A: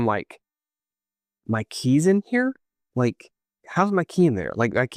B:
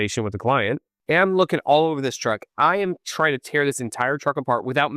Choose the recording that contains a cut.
B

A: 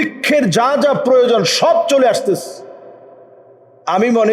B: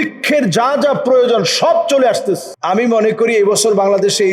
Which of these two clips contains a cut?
B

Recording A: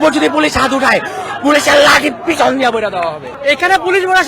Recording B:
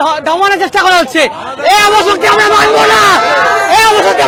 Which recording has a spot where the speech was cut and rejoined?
A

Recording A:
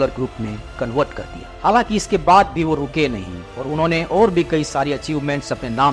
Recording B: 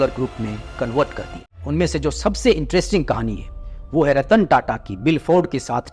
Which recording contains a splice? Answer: B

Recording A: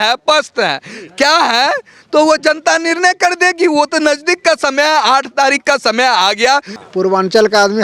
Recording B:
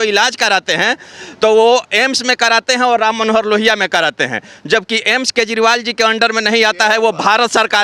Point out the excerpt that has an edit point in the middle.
A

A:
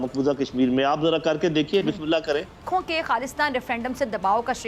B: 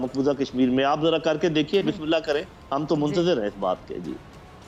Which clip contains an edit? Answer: A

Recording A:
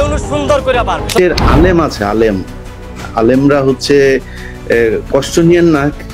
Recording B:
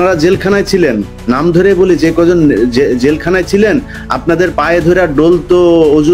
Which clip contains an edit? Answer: A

